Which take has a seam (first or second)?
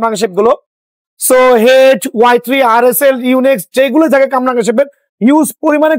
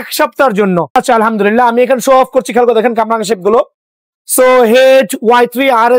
second